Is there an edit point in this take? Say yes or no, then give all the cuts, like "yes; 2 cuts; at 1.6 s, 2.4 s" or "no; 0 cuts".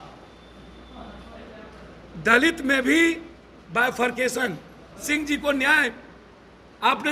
yes; 1 cut; at 5.0 s